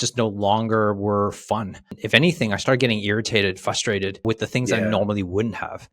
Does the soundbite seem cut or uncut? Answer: cut